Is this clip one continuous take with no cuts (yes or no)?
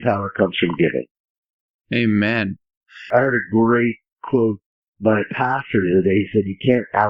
yes